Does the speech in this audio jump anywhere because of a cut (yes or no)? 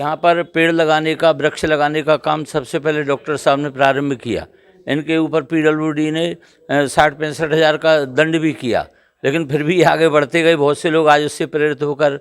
no